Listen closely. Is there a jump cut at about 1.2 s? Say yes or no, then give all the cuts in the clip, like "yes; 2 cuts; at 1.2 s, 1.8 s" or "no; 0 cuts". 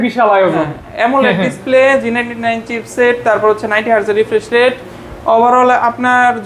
no; 0 cuts